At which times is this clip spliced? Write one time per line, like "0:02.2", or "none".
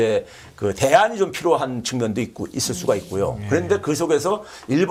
none